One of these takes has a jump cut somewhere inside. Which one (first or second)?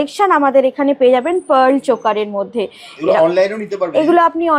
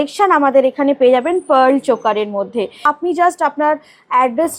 second